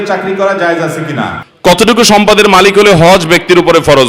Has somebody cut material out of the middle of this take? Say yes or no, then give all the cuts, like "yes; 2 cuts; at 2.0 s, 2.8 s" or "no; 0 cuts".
yes; 1 cut; at 1.4 s